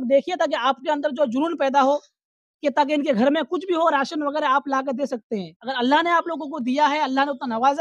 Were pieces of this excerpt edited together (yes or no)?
yes